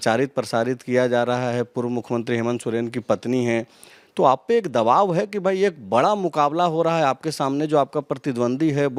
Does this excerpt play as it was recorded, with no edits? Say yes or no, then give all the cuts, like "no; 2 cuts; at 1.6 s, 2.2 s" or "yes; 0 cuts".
yes; 0 cuts